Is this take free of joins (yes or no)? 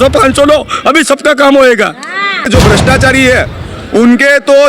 no